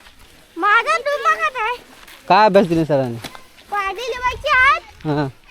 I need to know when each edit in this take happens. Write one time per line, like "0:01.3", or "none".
0:02.1